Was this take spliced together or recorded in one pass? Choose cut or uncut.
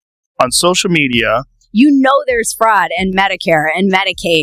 cut